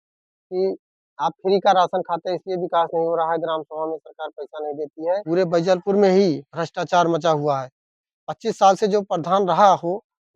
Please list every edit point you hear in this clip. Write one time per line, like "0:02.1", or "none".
0:05.2